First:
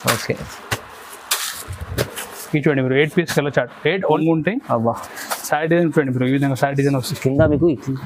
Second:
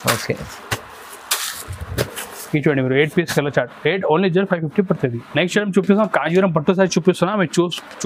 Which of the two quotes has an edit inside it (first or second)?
first